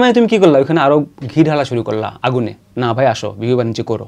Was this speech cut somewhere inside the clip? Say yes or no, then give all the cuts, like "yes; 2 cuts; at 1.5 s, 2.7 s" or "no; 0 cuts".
no; 0 cuts